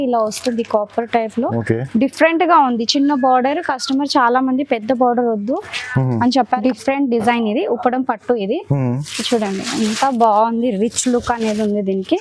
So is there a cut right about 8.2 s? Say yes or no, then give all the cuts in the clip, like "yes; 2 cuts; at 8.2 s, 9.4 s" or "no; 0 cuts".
no; 1 cut; at 6.6 s